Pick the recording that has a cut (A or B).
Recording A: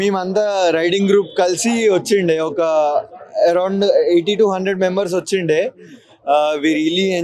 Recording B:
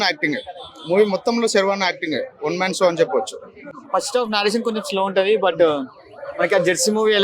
B